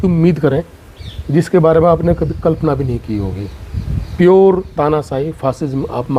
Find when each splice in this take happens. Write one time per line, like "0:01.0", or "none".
none